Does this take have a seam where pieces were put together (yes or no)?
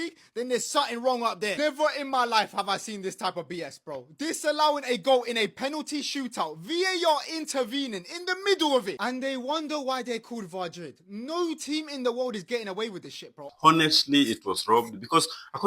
yes